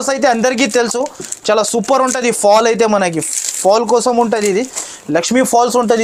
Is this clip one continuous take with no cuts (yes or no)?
yes